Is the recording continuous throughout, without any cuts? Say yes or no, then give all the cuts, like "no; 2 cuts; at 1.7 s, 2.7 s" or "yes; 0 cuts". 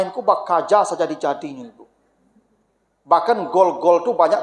yes; 0 cuts